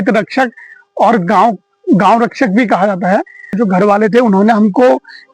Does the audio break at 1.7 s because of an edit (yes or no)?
no